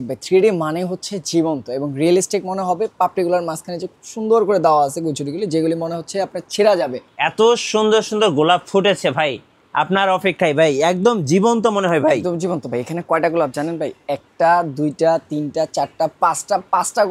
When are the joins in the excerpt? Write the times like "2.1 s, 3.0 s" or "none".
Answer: 7.0 s